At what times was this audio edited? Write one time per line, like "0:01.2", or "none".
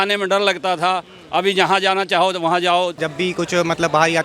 0:03.0